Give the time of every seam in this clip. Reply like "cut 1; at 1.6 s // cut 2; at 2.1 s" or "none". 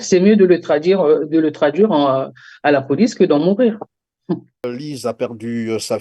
cut 1; at 4.7 s